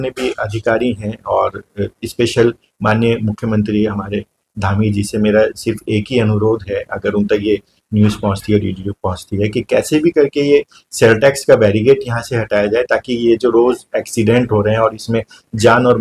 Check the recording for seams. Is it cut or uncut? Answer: uncut